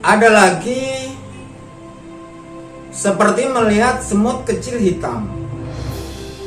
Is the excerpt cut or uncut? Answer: cut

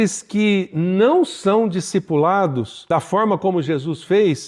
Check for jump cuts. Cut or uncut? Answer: cut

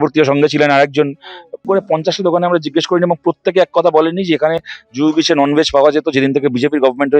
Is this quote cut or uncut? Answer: cut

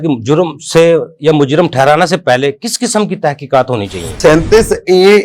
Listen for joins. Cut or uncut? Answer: cut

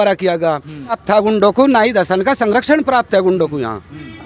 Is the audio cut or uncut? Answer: cut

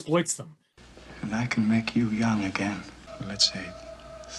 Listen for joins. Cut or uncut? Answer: cut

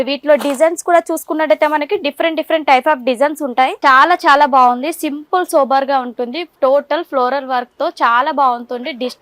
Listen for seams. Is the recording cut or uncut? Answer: cut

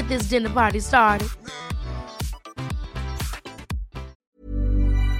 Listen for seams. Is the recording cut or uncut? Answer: cut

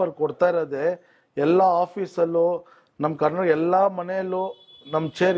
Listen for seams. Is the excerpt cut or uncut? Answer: uncut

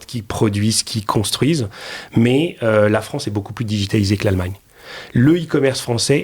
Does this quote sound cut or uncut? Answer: uncut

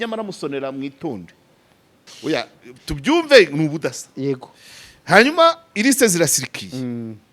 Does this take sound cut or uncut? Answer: cut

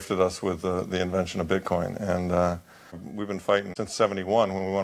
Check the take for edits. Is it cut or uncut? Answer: cut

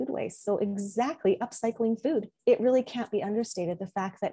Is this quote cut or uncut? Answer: cut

